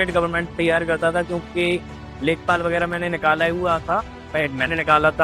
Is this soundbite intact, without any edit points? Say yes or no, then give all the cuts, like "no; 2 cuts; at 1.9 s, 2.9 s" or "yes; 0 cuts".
yes; 0 cuts